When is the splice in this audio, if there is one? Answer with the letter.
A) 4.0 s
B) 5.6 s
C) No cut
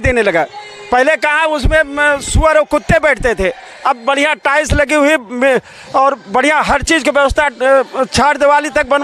C